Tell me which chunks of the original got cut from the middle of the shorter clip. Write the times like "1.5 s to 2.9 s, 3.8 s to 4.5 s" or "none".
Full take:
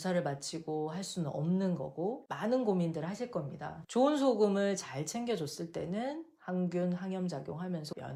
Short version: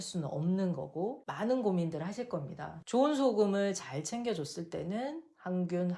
none